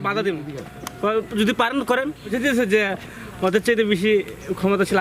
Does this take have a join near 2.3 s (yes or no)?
yes